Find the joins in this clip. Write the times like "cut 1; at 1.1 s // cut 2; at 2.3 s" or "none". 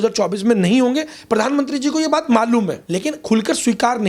cut 1; at 2.8 s